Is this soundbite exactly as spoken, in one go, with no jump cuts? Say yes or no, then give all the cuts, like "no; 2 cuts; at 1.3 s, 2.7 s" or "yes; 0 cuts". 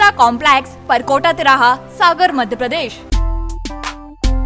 no; 1 cut; at 3.0 s